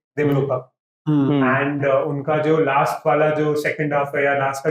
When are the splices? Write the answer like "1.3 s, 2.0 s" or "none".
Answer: none